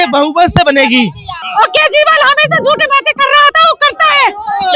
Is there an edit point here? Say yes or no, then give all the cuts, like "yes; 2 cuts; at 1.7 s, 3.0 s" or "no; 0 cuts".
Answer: yes; 1 cut; at 1.4 s